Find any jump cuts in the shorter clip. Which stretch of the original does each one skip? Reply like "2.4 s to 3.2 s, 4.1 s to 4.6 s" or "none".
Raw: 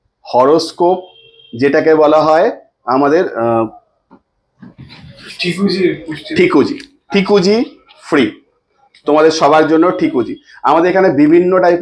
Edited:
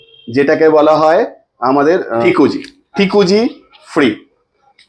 3.5 s to 6.4 s